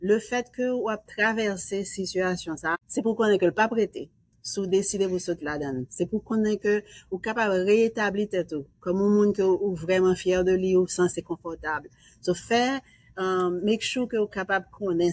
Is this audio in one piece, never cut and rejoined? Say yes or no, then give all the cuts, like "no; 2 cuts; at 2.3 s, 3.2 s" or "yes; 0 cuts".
no; 1 cut; at 2.8 s